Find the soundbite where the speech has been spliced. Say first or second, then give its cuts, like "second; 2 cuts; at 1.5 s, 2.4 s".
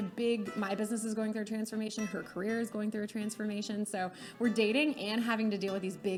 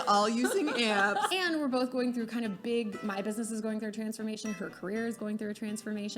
second; 1 cut; at 1.3 s